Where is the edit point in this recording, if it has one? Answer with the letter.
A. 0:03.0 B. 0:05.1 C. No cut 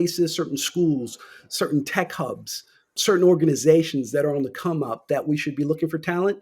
A